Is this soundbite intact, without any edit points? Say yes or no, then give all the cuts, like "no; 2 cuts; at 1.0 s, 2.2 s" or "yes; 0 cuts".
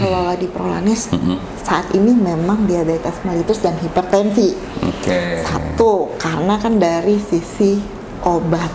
yes; 0 cuts